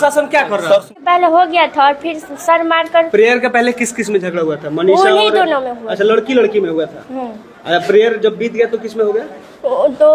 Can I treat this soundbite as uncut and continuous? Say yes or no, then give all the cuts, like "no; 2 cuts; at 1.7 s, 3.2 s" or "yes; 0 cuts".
no; 1 cut; at 0.9 s